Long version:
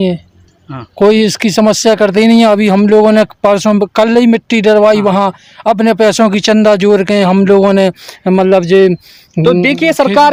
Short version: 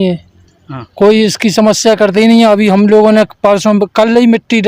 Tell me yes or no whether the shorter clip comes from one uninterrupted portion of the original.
yes